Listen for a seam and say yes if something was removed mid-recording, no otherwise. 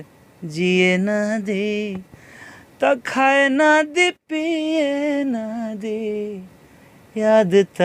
no